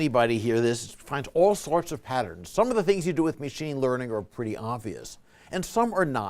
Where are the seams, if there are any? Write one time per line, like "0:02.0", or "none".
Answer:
0:04.3